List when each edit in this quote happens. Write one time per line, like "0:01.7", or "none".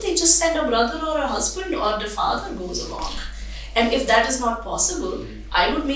none